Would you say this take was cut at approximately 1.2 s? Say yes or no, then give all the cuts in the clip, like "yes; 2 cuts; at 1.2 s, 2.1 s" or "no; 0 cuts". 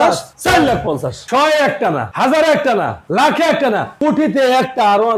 yes; 1 cut; at 1.2 s